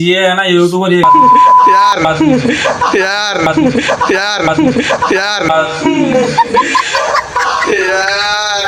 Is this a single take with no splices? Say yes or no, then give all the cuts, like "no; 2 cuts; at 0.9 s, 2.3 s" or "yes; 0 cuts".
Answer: yes; 0 cuts